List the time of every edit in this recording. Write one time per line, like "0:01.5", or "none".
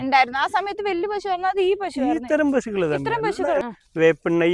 0:03.6